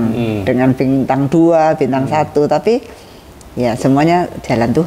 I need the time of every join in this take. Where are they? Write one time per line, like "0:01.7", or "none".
none